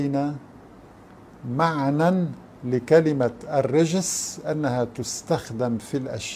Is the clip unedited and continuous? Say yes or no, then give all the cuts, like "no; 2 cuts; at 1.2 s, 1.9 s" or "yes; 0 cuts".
yes; 0 cuts